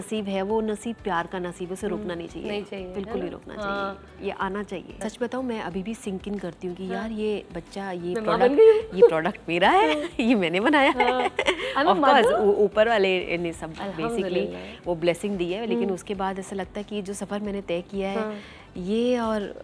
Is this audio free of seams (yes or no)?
yes